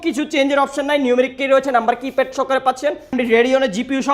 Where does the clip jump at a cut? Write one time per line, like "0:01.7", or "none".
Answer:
0:03.1